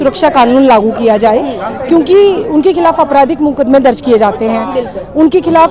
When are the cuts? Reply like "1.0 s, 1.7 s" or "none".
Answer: none